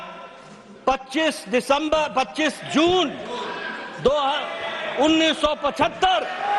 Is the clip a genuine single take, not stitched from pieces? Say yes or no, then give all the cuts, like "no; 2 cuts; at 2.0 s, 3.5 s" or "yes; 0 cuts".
yes; 0 cuts